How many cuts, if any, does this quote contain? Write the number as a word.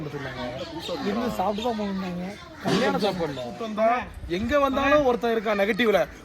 one